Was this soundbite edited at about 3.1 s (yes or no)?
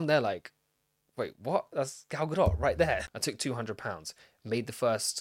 yes